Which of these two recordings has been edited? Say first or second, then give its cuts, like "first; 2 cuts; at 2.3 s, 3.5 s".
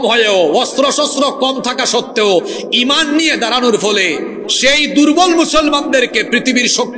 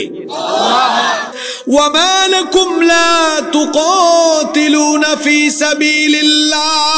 second; 1 cut; at 1.5 s